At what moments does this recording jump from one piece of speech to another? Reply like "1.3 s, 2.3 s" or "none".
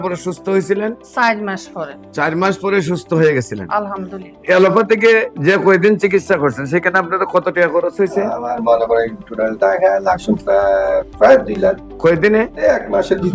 4.4 s